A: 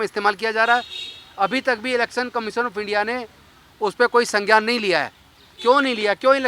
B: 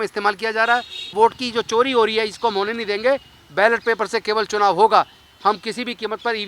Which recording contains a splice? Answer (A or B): B